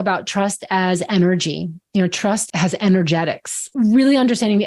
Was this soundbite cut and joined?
yes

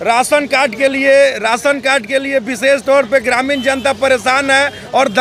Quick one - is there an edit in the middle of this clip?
no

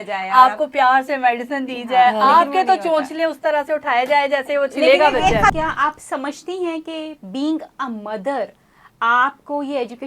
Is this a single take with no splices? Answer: no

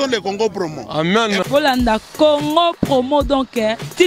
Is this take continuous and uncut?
yes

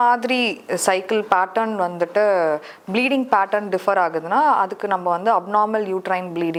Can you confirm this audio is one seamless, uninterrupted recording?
yes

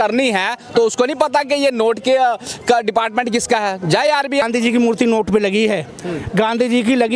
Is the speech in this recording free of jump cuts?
no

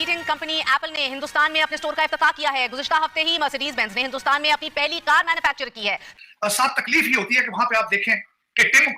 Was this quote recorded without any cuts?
no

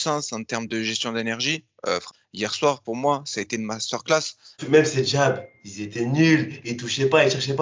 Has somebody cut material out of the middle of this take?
yes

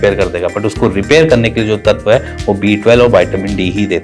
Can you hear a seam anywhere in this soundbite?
no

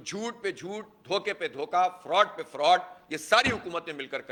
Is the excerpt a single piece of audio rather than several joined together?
yes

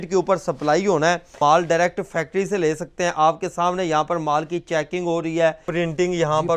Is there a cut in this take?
yes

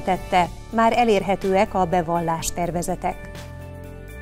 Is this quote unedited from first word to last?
yes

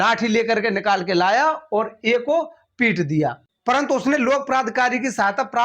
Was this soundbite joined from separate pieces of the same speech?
yes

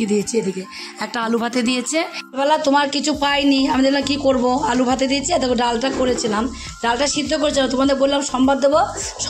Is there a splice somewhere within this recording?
yes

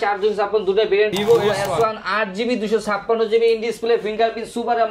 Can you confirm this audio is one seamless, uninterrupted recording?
no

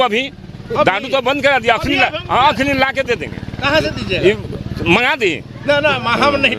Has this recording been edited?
no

